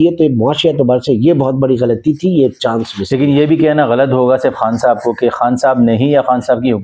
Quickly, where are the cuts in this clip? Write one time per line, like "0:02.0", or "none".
none